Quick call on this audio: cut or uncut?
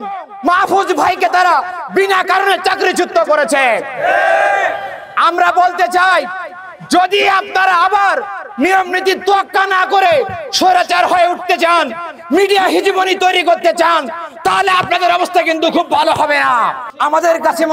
cut